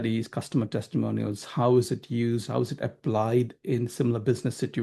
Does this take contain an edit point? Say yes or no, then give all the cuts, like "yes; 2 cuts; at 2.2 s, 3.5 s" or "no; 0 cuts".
no; 0 cuts